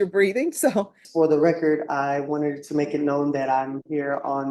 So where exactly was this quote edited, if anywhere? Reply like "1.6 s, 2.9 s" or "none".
1.0 s